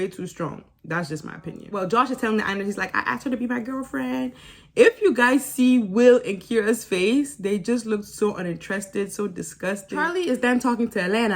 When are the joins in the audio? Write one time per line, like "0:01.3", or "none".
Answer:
0:01.6
0:09.9